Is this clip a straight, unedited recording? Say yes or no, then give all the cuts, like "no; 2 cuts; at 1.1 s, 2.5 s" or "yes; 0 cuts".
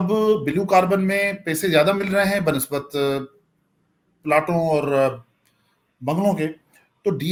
yes; 0 cuts